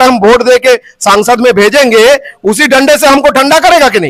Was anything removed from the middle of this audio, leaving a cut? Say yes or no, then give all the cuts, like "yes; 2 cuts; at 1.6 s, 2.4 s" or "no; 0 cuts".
no; 0 cuts